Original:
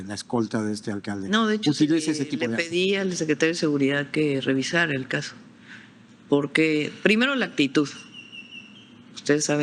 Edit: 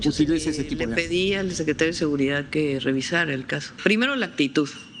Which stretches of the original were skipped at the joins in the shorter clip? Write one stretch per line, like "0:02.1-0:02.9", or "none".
0:05.3-0:06.9